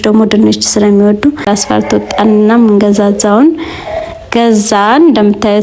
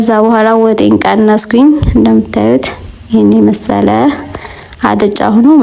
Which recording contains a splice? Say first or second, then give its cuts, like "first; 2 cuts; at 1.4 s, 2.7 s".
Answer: first; 1 cut; at 1.4 s